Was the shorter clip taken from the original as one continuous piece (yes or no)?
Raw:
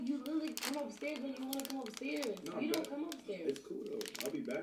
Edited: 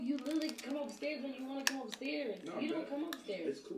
yes